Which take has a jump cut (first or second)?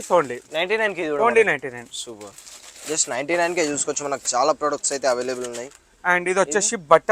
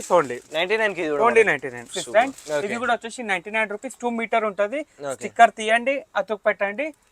second